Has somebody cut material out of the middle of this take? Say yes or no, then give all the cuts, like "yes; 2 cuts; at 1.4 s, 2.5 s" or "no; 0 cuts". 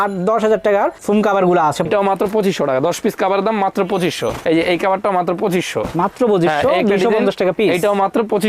yes; 1 cut; at 1.9 s